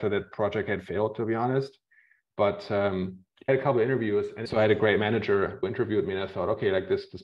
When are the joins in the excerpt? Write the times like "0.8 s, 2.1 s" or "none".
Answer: 3.2 s, 4.4 s, 5.6 s